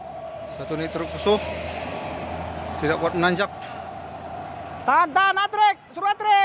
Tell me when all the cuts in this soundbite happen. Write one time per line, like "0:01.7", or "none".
none